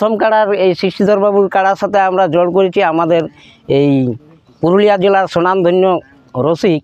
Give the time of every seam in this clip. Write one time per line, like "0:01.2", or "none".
none